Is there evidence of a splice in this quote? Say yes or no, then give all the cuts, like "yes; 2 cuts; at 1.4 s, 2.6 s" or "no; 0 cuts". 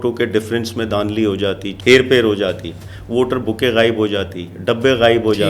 yes; 1 cut; at 1.7 s